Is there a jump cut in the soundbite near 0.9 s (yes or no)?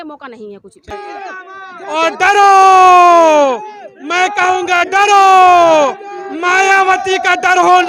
yes